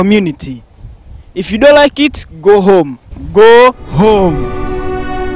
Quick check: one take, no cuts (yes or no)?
no